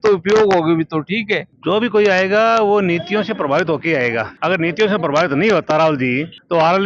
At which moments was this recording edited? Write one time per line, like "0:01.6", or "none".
0:01.5
0:04.3